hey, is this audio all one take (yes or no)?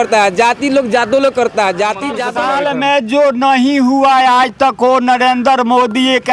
no